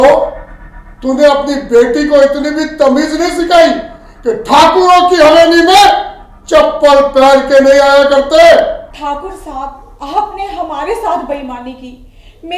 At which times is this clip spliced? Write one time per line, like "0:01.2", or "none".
0:08.9